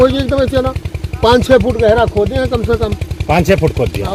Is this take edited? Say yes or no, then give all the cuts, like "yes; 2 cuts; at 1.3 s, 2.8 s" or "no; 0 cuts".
no; 0 cuts